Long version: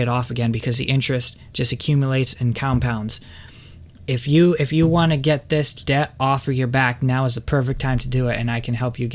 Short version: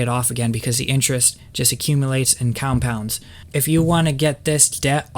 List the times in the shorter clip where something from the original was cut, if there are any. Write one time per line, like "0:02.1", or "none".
0:03.5